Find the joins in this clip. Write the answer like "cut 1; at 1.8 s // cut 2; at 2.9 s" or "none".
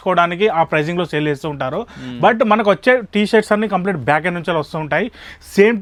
none